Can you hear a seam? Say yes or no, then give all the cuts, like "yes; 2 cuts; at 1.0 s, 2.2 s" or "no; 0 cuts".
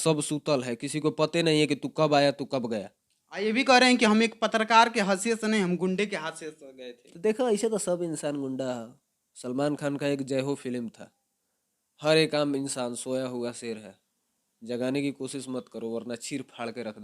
yes; 1 cut; at 2.8 s